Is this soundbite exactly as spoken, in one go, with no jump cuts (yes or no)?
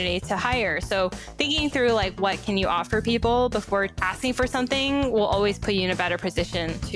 no